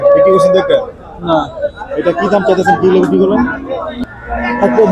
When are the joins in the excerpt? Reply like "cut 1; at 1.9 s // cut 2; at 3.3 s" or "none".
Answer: cut 1; at 3.9 s